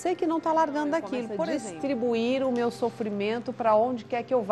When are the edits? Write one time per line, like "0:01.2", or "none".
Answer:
0:01.3